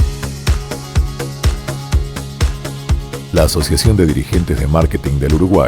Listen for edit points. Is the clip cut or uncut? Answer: cut